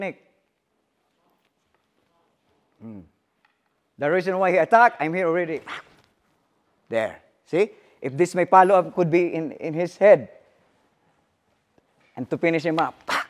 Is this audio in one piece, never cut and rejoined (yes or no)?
yes